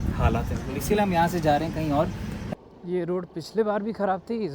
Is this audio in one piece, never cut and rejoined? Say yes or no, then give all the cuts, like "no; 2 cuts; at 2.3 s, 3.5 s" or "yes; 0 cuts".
no; 1 cut; at 2.4 s